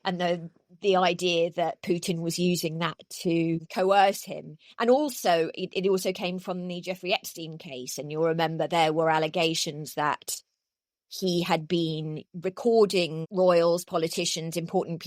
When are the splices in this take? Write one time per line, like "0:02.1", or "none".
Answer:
0:03.7
0:13.2